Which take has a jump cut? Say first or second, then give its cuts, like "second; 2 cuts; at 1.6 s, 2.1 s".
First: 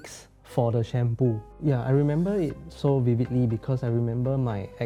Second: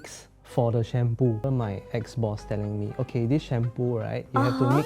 second; 1 cut; at 1.4 s